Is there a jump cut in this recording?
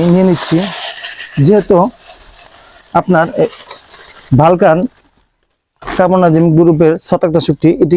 no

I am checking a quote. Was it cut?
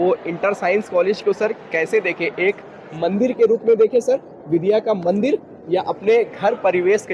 no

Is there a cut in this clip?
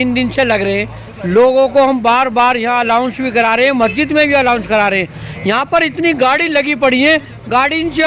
no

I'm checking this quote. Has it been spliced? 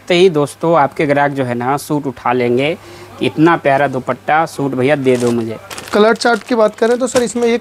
no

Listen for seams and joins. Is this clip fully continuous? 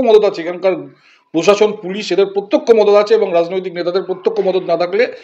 yes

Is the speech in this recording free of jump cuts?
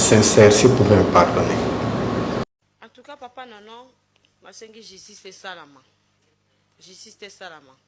no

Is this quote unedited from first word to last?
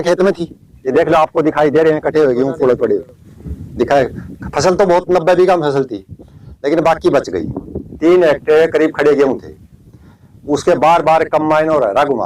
yes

